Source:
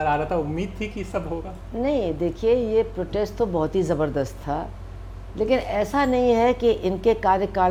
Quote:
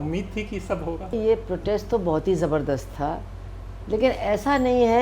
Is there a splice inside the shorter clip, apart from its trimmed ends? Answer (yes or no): yes